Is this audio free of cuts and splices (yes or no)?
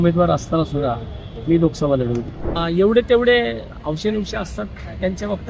no